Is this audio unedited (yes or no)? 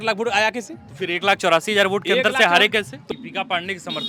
yes